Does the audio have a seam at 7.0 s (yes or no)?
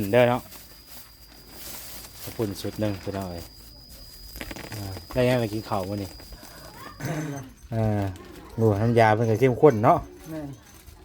yes